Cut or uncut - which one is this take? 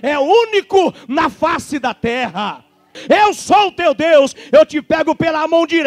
cut